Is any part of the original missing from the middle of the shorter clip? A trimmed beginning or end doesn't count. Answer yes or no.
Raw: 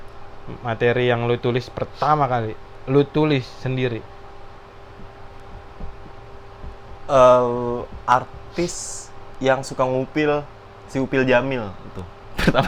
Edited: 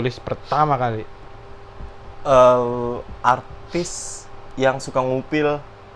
yes